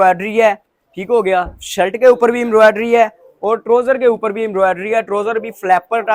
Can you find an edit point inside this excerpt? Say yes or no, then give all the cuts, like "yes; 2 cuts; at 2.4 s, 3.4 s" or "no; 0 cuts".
no; 0 cuts